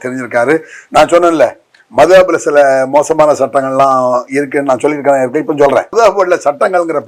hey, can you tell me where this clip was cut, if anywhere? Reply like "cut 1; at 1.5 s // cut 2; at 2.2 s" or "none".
cut 1; at 5.9 s